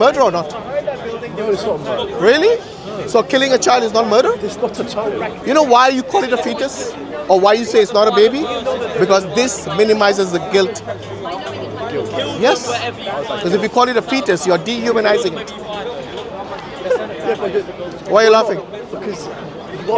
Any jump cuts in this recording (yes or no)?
yes